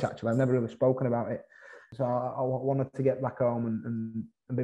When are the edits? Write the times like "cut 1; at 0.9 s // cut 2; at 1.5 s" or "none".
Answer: cut 1; at 1.8 s